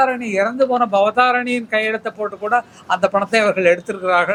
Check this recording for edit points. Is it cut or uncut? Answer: uncut